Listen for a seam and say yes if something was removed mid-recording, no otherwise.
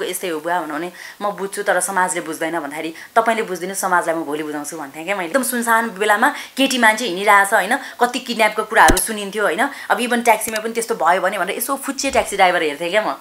yes